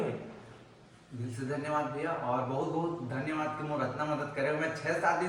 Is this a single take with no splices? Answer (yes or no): yes